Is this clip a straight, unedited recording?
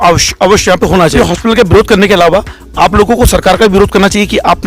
no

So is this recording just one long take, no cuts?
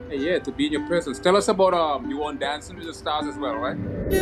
yes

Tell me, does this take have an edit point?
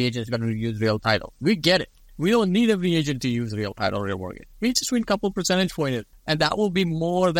yes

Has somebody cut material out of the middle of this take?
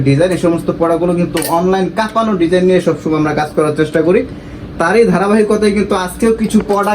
no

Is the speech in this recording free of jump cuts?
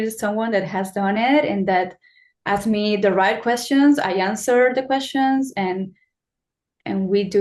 yes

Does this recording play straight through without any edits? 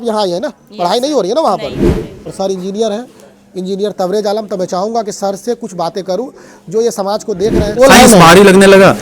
no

